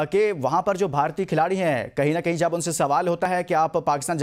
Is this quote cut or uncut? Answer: uncut